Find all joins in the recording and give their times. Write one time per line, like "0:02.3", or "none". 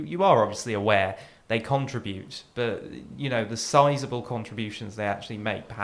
none